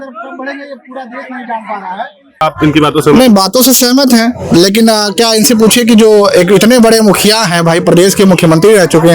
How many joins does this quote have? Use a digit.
1